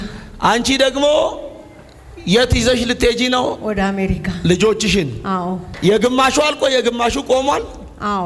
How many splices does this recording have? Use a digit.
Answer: 1